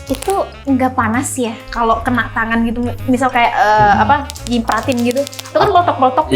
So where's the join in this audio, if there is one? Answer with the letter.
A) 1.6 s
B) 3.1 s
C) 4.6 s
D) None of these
A